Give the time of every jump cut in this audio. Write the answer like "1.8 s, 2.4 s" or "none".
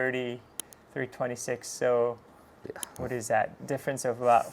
none